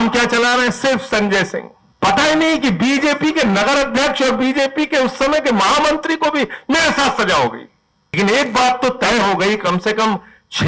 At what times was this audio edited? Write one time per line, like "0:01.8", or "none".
0:01.8
0:08.2